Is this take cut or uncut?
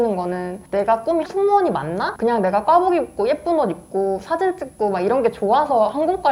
cut